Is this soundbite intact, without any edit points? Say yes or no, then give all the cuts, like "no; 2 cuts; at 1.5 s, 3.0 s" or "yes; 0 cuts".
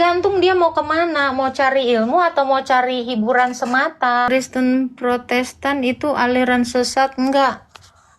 no; 1 cut; at 4.3 s